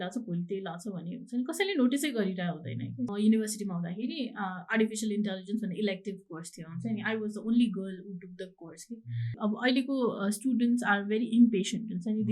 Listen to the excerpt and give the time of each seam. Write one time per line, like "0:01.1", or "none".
0:03.1
0:09.4